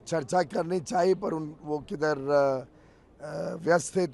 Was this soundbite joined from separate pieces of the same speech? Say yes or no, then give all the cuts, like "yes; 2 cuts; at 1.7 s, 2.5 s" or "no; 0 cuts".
no; 0 cuts